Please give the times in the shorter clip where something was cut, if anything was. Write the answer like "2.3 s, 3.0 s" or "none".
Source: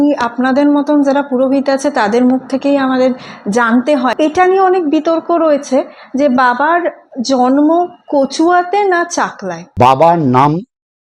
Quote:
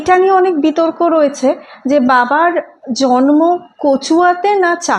none